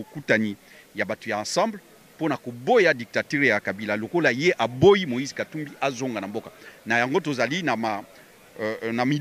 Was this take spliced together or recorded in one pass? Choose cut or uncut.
uncut